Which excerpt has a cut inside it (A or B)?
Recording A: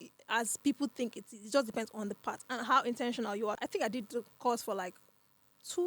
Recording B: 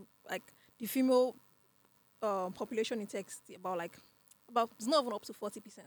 A